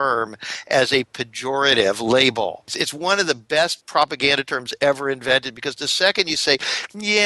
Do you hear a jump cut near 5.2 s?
no; 2 cuts; at 2.8 s, 3.8 s

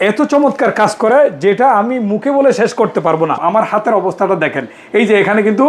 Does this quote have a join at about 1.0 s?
no; 1 cut; at 3.4 s

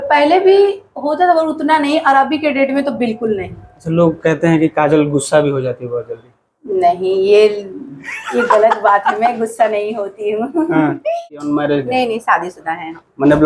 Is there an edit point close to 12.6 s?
no; 1 cut; at 11.1 s

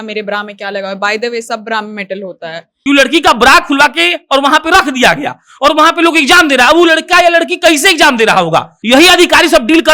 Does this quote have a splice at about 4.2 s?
no; 2 cuts; at 2.7 s, 8.7 s

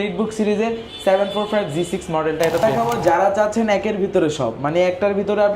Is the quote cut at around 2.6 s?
yes; 1 cut; at 2.6 s

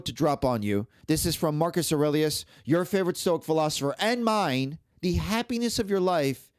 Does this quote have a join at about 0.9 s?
yes; 2 cuts; at 0.9 s, 4.8 s

